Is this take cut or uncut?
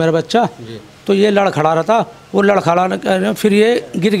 uncut